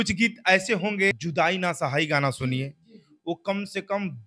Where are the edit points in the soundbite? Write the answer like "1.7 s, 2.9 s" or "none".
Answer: 1.2 s